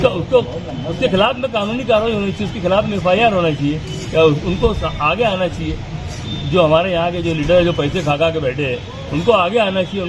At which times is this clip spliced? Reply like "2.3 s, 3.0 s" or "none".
none